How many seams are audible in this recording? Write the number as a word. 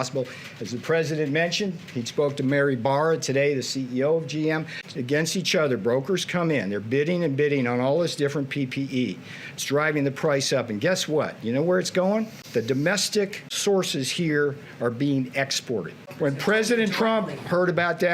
three